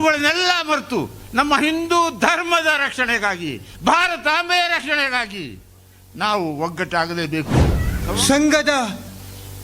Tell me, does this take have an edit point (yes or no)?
yes